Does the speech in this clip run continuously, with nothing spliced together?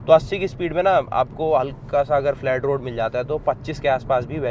yes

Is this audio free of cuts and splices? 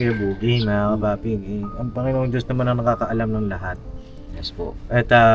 yes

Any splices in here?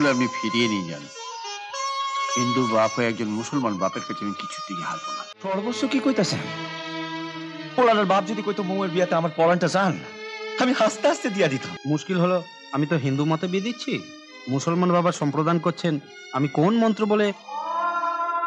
yes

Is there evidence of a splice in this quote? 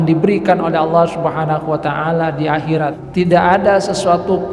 yes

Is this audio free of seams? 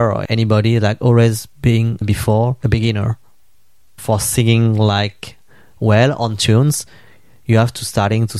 yes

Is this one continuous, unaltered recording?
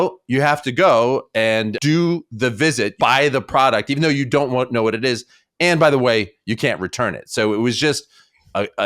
no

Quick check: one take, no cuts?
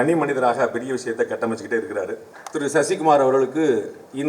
no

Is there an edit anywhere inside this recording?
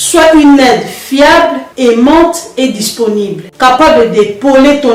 no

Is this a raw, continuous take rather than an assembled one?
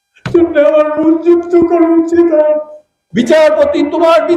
no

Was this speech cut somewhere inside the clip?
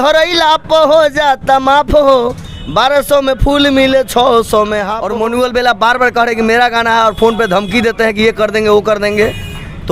yes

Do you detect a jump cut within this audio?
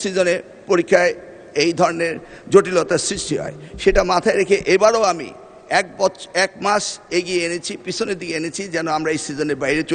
no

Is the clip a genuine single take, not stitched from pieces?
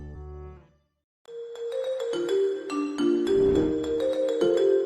no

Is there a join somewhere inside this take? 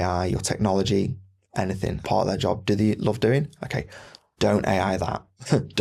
yes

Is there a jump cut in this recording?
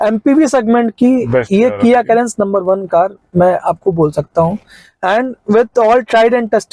no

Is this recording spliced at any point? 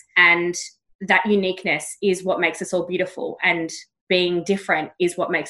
no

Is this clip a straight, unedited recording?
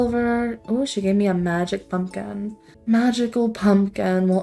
no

